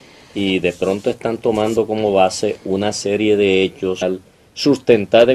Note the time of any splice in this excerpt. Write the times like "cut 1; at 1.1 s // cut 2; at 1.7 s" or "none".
none